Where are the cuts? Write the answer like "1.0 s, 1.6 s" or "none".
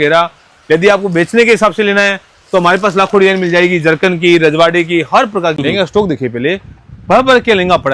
5.6 s